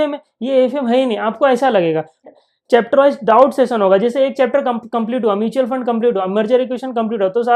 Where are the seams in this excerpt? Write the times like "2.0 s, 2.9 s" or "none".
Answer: 2.2 s